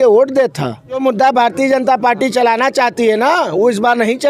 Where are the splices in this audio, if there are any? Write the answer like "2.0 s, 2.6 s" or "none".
1.0 s